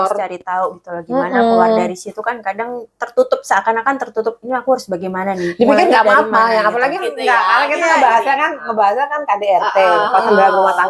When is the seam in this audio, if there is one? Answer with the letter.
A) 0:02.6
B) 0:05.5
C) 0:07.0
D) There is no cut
C